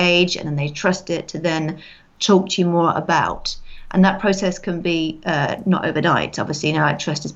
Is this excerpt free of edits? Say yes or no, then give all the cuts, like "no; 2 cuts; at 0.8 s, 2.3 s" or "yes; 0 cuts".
yes; 0 cuts